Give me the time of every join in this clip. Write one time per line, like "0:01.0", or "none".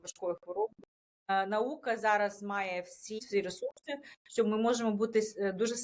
0:01.3
0:03.2